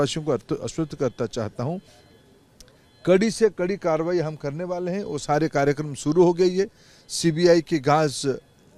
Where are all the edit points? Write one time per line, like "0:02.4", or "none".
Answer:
none